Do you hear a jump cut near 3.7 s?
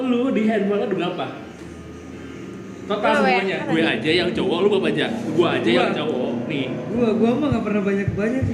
yes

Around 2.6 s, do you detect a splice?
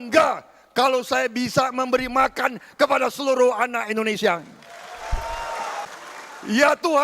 no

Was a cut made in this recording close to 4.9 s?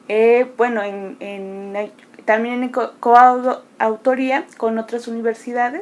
yes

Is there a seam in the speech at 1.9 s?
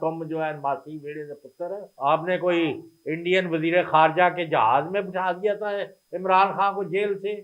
yes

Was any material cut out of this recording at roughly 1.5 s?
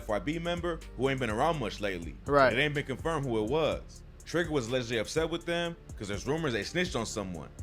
no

